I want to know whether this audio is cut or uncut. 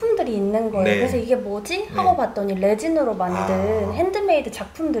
uncut